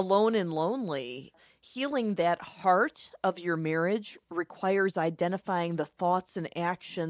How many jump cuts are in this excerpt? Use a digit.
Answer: 1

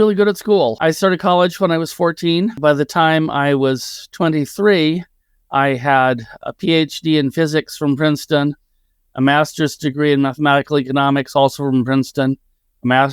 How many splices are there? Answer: 2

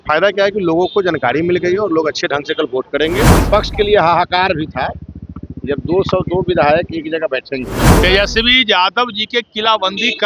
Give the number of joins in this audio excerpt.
2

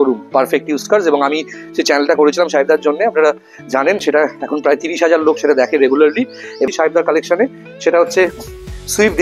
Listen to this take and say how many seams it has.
0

